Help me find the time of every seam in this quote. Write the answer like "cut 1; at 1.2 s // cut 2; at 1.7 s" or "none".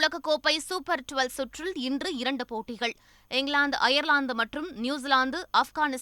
none